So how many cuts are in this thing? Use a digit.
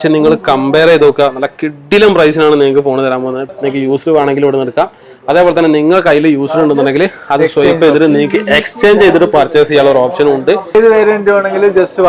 2